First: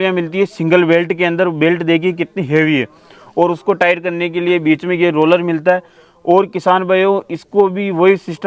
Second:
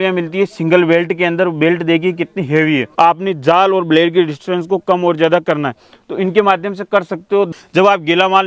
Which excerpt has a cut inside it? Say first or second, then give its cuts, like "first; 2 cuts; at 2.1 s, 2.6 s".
second; 2 cuts; at 2.9 s, 7.5 s